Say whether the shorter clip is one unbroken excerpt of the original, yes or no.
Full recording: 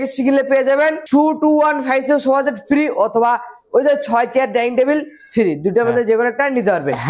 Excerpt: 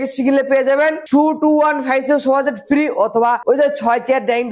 no